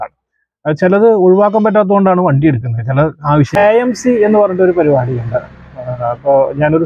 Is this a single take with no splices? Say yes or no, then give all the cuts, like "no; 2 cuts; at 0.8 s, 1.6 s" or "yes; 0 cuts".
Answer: no; 1 cut; at 3.6 s